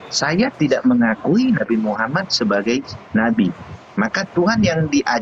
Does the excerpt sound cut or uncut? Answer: uncut